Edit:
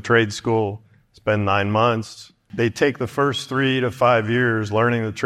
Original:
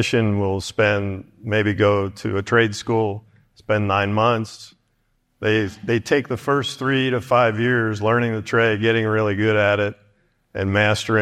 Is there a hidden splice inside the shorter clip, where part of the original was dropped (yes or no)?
yes